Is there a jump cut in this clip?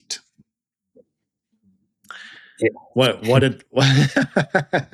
no; 0 cuts

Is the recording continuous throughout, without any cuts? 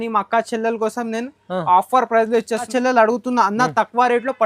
no; 1 cut; at 2.7 s

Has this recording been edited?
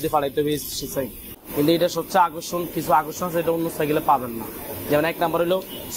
yes; 1 cut; at 1.4 s

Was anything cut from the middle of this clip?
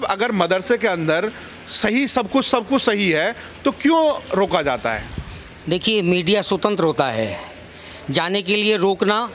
no; 0 cuts

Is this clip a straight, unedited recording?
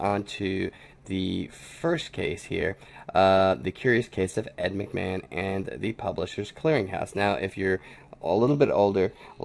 no; 1 cut; at 1.6 s

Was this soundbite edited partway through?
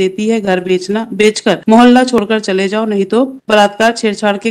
yes; 2 cuts; at 1.6 s, 3.4 s

